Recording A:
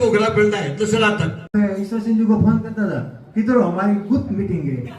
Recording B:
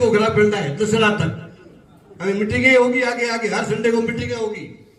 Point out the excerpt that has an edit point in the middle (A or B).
A